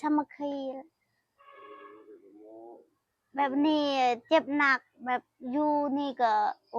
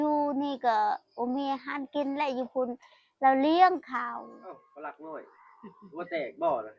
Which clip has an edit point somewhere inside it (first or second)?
second